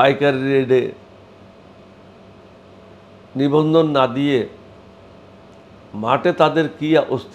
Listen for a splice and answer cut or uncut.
uncut